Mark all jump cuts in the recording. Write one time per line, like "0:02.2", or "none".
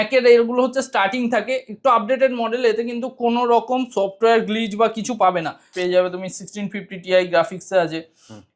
0:05.8